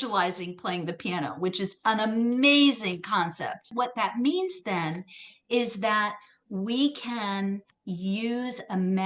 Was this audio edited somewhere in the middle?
yes; 2 cuts; at 3.6 s, 7.7 s

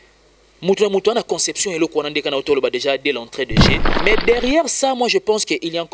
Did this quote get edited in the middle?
yes; 1 cut; at 3.9 s

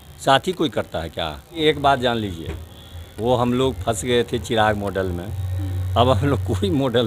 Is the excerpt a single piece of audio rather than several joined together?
yes; 0 cuts

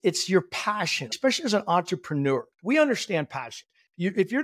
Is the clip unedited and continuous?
no; 2 cuts; at 1.1 s, 2.5 s

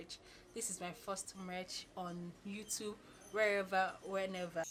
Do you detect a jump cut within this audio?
no; 0 cuts

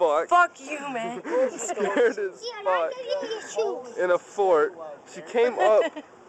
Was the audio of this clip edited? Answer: no; 0 cuts

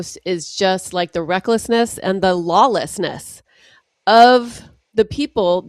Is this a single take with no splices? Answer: yes; 0 cuts

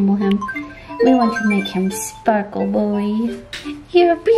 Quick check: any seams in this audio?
no; 0 cuts

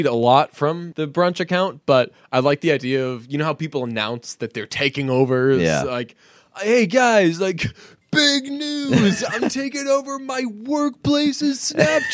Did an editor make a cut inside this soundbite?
yes; 1 cut; at 0.9 s

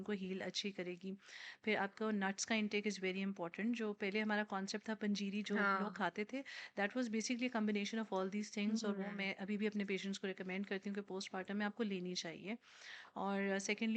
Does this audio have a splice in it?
no; 0 cuts

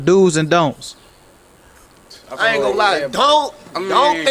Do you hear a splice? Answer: no; 0 cuts

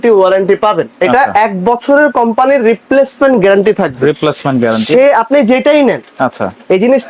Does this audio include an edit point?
no; 0 cuts

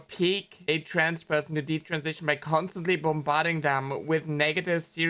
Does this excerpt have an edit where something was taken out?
no; 0 cuts

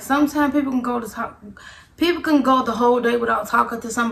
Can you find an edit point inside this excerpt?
no; 0 cuts

